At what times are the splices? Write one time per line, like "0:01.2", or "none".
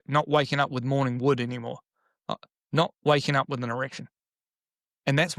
none